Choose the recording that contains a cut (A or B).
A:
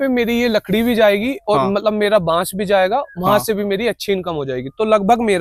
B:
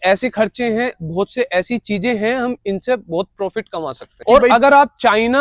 B